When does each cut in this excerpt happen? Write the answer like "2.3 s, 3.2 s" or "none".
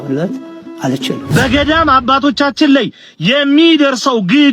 1.2 s